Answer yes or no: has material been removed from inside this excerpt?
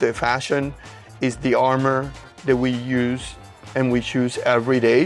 no